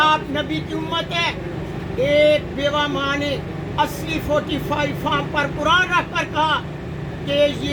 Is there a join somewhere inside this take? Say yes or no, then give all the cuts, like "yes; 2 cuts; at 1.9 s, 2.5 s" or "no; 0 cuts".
no; 0 cuts